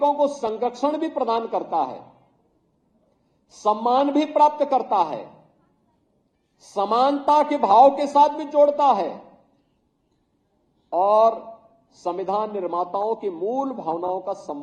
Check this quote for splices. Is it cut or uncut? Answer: uncut